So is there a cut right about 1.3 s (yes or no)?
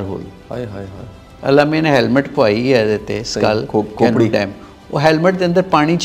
yes